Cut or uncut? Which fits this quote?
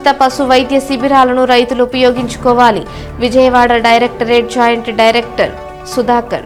uncut